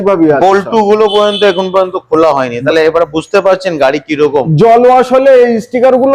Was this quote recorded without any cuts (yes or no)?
yes